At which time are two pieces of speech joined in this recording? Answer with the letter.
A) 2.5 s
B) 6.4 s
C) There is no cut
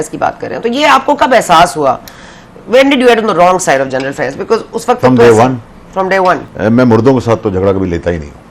B